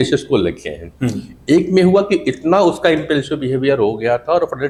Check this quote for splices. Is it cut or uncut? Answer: uncut